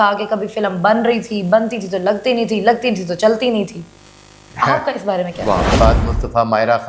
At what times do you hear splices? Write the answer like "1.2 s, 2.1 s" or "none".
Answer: 5.7 s